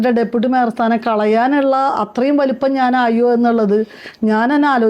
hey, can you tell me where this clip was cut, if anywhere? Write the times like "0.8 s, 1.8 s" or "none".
none